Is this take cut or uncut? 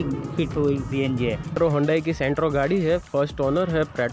cut